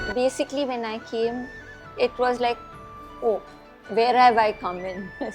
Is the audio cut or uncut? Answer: uncut